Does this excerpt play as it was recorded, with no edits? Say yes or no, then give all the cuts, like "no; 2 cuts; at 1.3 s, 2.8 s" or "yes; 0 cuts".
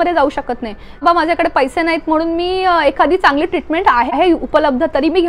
no; 2 cuts; at 1.0 s, 4.1 s